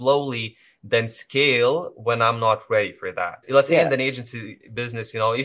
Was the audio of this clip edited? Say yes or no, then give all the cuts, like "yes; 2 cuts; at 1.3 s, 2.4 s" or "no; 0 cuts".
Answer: yes; 1 cut; at 3.4 s